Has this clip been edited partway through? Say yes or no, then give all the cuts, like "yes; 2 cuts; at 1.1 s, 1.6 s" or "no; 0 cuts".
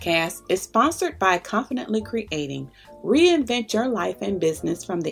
no; 0 cuts